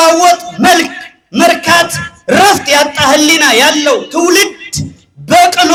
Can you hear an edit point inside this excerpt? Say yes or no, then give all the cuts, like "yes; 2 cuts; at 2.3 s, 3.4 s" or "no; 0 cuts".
no; 0 cuts